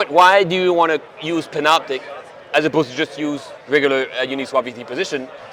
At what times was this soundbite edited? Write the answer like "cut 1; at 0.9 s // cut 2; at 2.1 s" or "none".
none